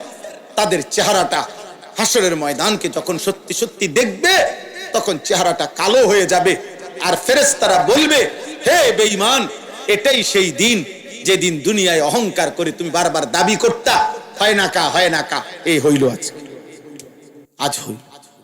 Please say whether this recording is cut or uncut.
cut